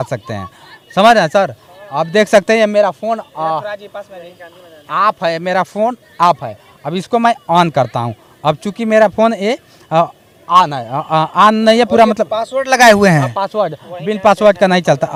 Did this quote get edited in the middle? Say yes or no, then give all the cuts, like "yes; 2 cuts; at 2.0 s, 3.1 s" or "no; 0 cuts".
no; 0 cuts